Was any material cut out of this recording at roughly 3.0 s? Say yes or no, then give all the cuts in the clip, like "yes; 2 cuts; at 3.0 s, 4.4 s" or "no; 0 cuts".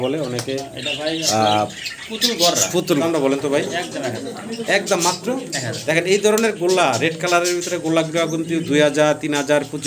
yes; 1 cut; at 3.0 s